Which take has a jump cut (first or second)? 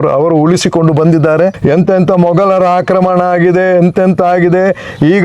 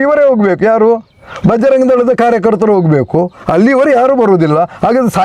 first